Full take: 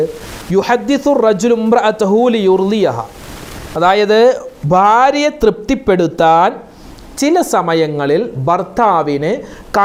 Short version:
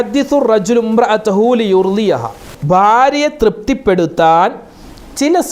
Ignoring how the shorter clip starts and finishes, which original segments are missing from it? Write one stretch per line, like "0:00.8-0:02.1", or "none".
0:03.2-0:04.5